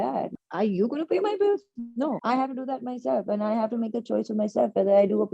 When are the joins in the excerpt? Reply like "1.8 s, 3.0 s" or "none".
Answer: none